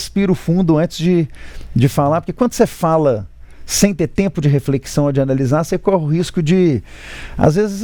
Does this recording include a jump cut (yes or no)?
no